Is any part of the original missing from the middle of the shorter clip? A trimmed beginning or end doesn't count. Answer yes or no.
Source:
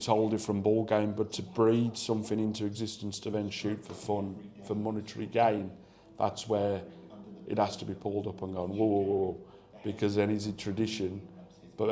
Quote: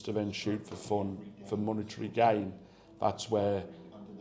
no